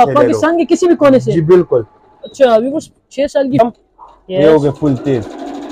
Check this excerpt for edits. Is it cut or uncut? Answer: cut